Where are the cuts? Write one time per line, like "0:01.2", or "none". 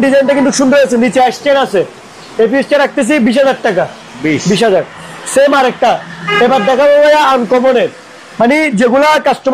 none